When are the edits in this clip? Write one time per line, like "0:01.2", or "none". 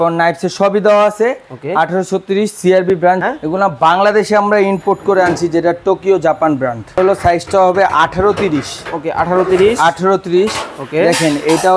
0:03.2
0:07.0